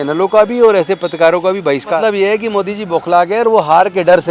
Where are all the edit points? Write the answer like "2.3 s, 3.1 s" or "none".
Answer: 2.0 s

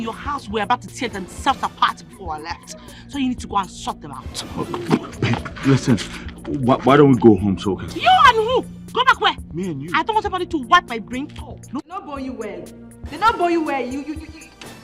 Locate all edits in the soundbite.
12.0 s

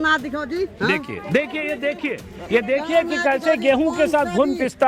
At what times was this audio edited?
none

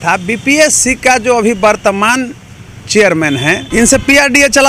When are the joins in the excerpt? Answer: 3.6 s

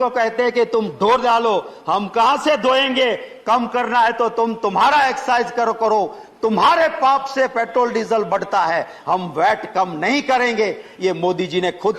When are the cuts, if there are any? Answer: none

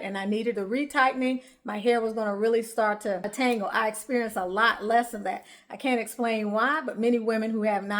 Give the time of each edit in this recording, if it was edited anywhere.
3.3 s

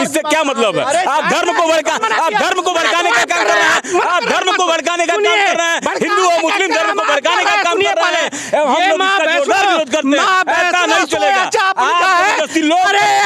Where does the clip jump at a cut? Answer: none

